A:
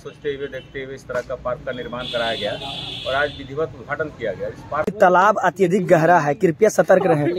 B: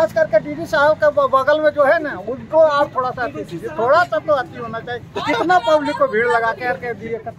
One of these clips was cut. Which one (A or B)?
A